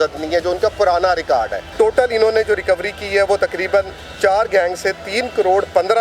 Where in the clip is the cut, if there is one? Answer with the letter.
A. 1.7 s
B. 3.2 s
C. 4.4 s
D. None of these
A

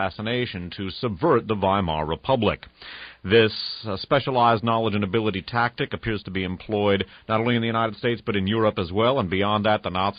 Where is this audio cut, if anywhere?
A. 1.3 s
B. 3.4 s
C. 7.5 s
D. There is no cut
B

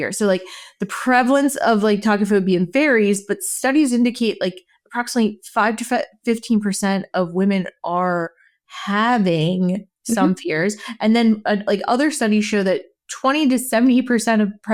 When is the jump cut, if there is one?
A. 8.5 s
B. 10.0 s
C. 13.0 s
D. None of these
D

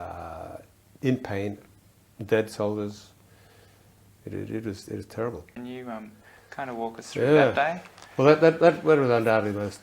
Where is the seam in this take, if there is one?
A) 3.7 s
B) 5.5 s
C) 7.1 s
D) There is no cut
B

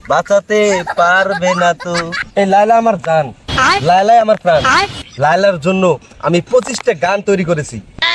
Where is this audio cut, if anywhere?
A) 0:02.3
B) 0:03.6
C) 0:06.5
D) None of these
A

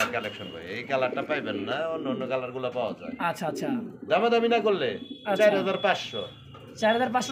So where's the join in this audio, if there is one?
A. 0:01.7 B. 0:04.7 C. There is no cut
C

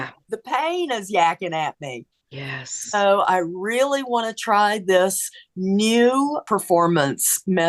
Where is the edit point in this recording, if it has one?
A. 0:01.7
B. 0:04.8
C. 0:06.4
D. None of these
C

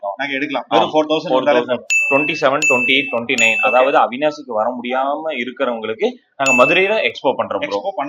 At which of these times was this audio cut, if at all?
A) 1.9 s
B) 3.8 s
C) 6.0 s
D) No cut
A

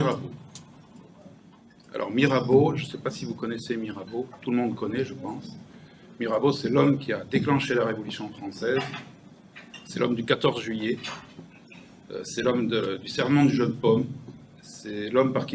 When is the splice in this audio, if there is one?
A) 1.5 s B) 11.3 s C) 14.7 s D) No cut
A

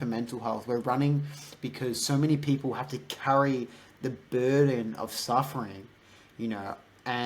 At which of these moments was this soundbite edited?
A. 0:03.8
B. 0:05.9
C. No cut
C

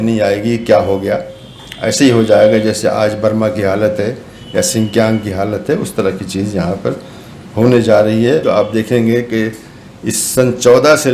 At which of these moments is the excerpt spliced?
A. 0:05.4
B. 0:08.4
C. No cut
B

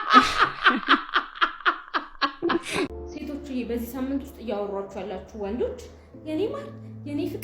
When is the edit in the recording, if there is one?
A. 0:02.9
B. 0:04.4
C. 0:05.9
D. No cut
A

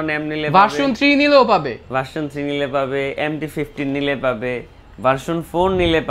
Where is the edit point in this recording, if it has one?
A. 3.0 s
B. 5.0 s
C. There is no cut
C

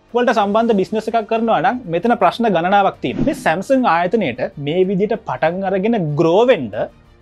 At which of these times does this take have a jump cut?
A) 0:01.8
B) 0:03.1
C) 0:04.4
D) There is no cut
B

